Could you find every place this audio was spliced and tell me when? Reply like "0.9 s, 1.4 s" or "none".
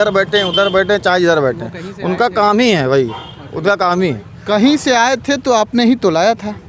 none